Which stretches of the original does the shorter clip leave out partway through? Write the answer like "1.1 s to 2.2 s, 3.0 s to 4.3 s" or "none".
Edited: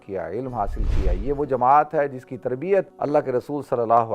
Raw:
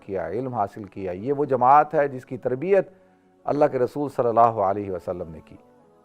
2.9 s to 3.4 s